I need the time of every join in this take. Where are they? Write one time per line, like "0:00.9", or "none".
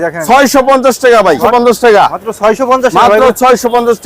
0:01.4